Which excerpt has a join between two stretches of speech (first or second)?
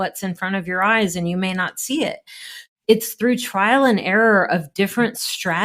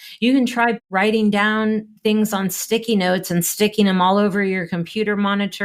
first